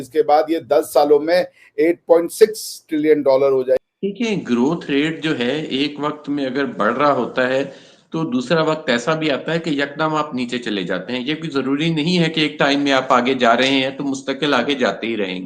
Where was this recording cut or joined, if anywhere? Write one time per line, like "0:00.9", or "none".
0:03.8